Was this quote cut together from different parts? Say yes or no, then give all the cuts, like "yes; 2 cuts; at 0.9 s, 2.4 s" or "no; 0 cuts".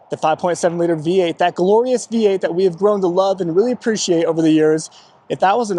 no; 0 cuts